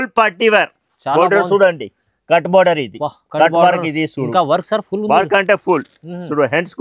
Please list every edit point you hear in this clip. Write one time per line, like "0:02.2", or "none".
none